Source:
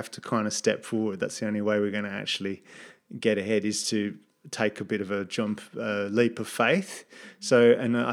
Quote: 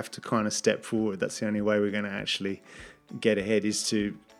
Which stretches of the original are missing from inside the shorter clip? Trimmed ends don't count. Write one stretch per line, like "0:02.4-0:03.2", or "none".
none